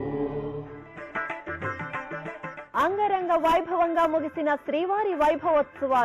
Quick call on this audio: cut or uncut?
cut